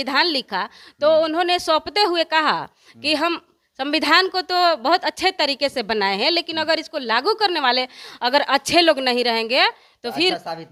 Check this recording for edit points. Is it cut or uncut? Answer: uncut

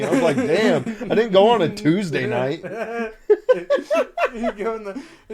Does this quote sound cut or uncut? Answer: uncut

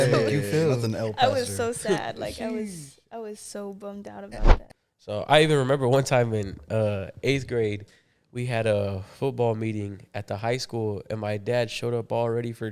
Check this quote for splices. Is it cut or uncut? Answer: cut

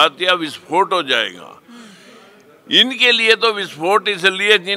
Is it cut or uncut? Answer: uncut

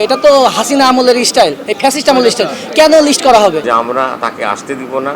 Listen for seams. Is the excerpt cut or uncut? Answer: cut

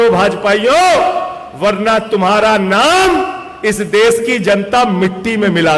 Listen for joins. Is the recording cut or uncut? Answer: uncut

